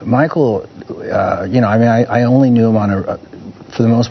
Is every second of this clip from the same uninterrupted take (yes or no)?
yes